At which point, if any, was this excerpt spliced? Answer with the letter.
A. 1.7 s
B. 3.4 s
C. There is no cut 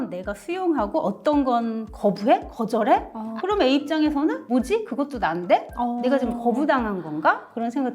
B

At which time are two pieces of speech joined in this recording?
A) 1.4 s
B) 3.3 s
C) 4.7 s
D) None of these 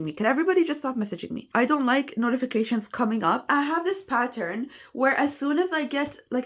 A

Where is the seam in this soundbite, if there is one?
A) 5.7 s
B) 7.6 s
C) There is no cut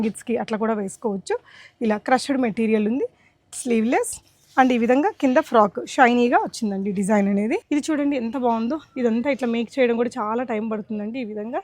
B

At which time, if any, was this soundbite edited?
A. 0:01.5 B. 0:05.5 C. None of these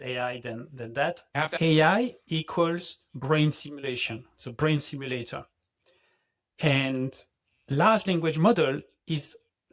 A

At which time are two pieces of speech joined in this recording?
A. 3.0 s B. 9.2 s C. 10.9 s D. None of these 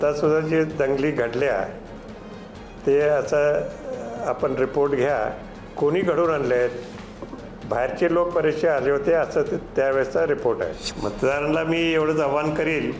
C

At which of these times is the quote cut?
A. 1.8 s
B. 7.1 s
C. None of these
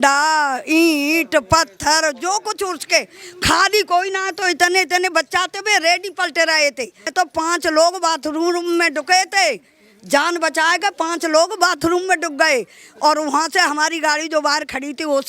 B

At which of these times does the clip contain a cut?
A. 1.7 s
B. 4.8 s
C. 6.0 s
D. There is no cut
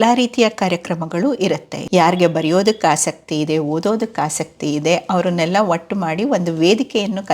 A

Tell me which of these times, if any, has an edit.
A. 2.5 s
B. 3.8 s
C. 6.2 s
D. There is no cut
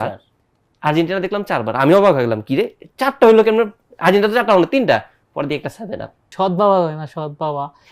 C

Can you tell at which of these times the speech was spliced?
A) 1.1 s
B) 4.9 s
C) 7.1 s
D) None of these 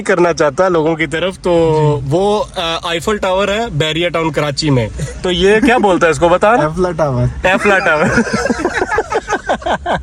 D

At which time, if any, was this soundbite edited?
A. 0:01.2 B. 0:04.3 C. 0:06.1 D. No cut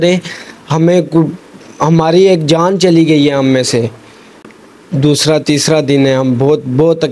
B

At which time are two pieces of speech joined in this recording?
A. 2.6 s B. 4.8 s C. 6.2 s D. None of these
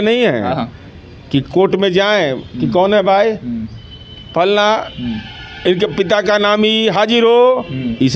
D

